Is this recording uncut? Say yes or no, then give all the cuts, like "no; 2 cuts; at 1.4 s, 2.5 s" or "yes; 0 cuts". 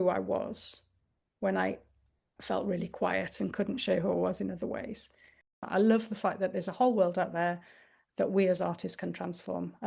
no; 1 cut; at 5.6 s